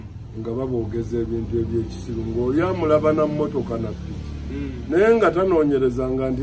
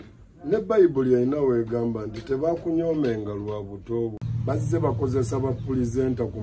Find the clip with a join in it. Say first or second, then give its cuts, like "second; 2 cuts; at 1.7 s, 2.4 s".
second; 1 cut; at 4.2 s